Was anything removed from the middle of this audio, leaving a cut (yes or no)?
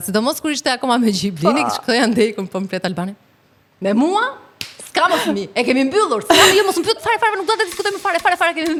no